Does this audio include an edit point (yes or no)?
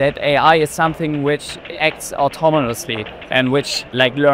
no